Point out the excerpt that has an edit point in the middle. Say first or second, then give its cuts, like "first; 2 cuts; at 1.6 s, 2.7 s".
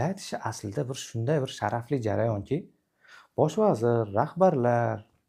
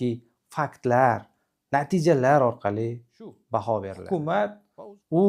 second; 1 cut; at 4.0 s